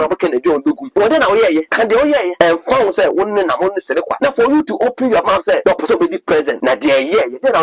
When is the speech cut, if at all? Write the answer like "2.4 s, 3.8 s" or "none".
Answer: 0.8 s, 2.1 s, 4.1 s, 5.6 s, 6.5 s